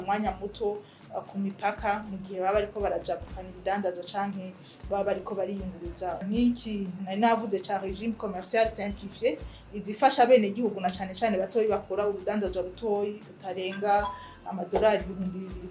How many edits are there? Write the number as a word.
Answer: one